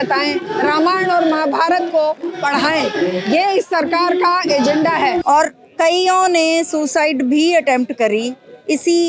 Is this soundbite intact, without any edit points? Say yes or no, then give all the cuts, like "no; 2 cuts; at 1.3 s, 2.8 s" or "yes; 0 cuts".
no; 1 cut; at 5.2 s